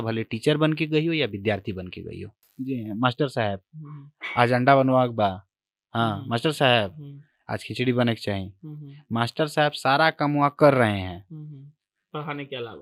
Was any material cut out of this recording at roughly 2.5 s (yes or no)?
yes